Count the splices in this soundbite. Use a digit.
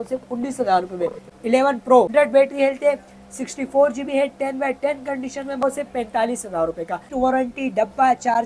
4